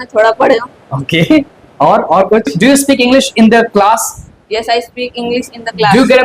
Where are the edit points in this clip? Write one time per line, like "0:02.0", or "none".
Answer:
0:02.5